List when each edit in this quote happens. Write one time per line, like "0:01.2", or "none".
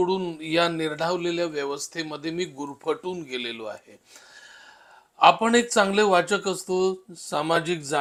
none